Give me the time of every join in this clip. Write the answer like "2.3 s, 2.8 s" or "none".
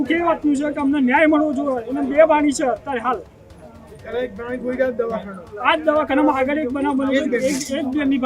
none